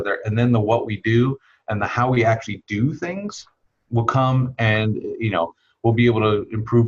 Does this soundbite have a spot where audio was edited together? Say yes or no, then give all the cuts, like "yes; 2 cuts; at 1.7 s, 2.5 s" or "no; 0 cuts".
no; 0 cuts